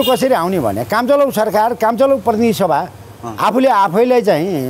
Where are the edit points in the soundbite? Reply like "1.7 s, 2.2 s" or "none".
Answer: none